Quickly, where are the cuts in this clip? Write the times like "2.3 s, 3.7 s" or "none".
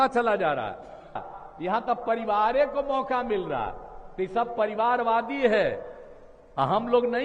1.3 s